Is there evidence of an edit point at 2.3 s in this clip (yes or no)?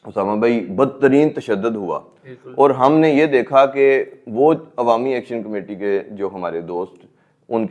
no